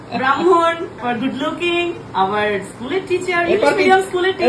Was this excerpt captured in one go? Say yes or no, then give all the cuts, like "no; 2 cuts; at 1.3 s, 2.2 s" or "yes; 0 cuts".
no; 1 cut; at 1.0 s